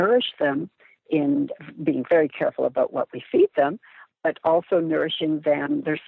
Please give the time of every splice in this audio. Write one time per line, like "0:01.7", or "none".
none